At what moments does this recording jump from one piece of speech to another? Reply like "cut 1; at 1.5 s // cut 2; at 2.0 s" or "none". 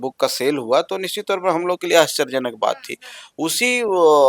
none